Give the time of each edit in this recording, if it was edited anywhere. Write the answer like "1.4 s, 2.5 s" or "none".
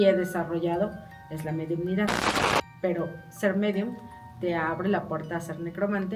2.6 s